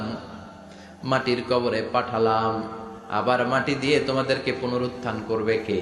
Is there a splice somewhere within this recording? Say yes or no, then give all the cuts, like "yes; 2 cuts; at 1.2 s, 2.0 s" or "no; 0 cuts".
no; 0 cuts